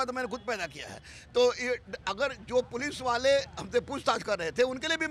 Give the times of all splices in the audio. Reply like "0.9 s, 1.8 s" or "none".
none